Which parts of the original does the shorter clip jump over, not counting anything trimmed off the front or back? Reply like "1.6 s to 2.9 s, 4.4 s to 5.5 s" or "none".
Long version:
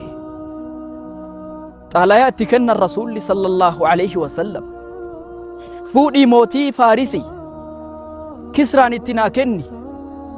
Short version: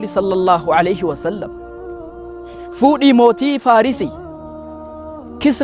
none